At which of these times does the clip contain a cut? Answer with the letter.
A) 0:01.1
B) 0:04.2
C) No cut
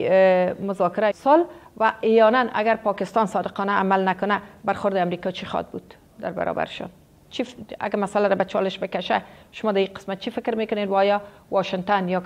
A